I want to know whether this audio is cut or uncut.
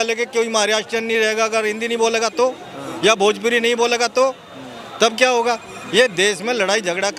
uncut